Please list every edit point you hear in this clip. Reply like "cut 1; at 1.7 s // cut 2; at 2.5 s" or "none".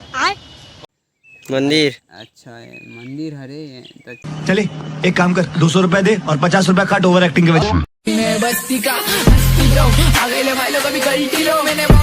cut 1; at 8.1 s